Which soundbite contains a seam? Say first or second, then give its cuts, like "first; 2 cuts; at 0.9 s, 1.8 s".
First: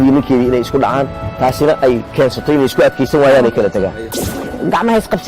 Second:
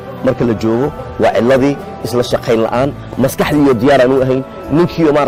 first; 1 cut; at 4.1 s